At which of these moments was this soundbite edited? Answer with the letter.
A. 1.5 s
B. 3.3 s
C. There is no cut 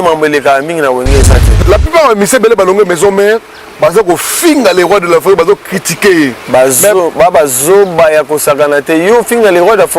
A